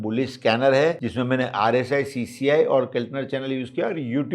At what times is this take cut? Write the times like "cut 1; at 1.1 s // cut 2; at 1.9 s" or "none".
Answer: cut 1; at 1.0 s

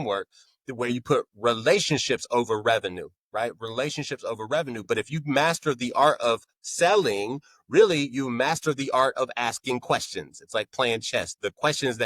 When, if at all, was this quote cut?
none

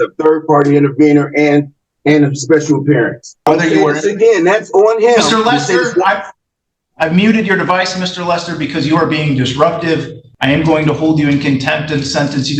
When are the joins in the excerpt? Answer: cut 1; at 3.5 s // cut 2; at 10.2 s

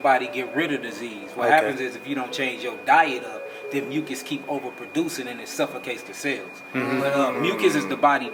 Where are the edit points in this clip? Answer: none

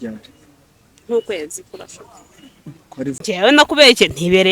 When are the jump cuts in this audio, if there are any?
cut 1; at 3.2 s

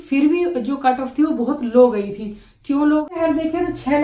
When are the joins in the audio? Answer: cut 1; at 3.1 s

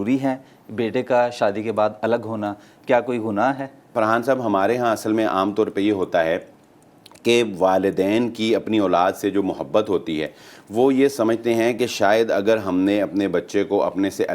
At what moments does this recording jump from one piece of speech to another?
cut 1; at 3.9 s

